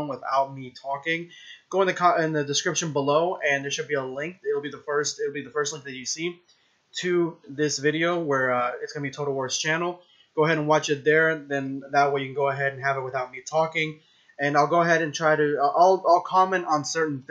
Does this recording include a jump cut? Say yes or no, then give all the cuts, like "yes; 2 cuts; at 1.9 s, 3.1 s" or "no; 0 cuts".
no; 0 cuts